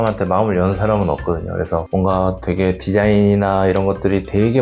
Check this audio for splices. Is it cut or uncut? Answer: cut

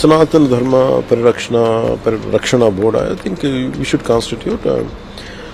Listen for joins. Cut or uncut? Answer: uncut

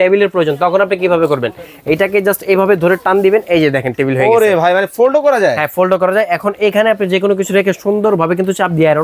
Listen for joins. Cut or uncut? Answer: uncut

